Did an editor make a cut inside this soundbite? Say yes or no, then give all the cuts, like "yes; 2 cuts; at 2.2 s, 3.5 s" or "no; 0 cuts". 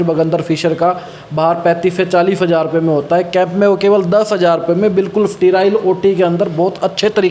no; 0 cuts